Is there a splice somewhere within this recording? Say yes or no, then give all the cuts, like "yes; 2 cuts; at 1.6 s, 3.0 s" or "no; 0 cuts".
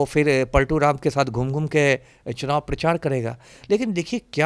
no; 0 cuts